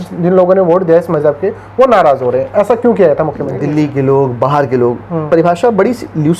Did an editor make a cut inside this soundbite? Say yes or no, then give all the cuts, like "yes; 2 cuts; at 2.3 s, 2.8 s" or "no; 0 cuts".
yes; 1 cut; at 3.5 s